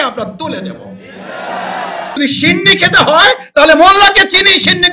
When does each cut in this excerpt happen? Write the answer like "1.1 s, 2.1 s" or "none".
2.2 s